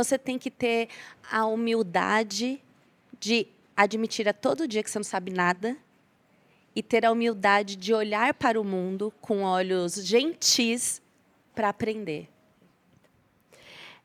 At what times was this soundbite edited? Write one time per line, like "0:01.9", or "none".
none